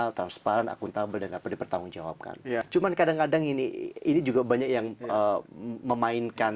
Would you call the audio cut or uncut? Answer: cut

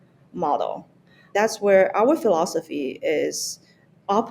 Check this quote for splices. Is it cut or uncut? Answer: cut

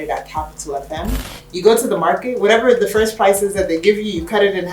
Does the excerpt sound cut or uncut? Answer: cut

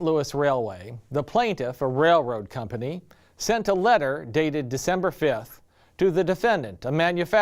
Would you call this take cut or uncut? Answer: uncut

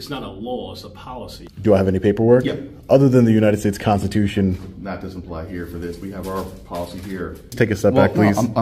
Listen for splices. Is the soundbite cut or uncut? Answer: cut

